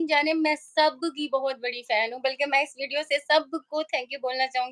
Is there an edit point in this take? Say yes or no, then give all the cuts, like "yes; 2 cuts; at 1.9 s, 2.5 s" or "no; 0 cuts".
no; 0 cuts